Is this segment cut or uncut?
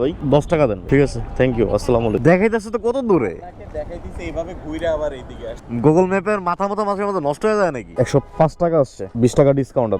cut